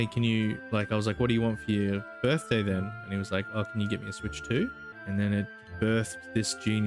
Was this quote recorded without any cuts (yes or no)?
no